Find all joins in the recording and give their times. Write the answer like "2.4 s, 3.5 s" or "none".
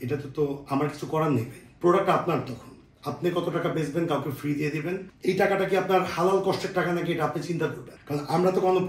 none